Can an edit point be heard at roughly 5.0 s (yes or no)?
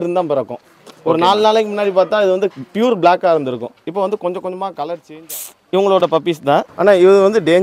yes